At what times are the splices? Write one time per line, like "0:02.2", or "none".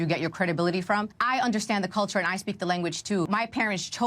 0:01.2
0:03.3